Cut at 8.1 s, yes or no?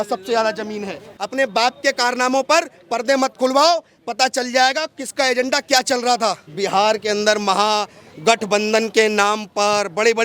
no